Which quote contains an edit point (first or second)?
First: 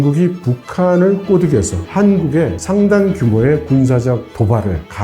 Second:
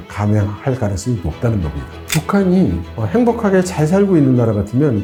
first